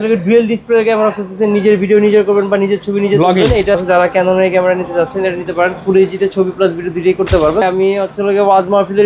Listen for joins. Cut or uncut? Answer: cut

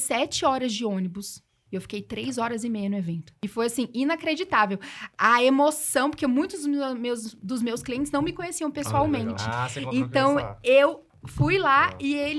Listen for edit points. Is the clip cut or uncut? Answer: cut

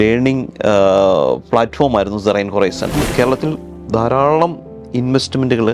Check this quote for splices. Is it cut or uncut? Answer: cut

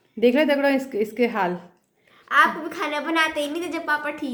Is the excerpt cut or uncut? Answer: uncut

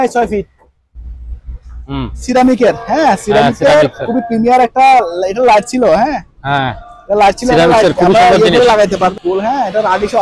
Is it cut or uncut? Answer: cut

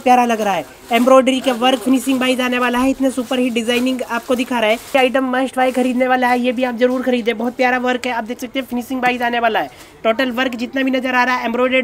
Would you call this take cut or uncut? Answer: cut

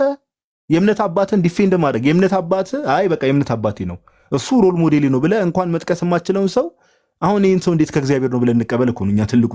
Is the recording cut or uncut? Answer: uncut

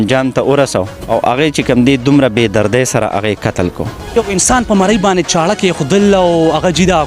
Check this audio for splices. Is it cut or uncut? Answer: cut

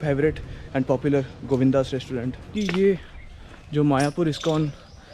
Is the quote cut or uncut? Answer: cut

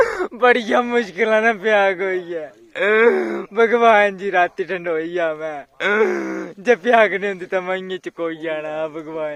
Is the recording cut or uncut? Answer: uncut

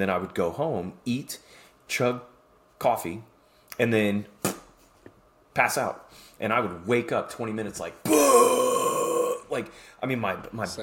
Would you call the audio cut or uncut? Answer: uncut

